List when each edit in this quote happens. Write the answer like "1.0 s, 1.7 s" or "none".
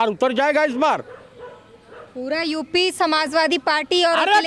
none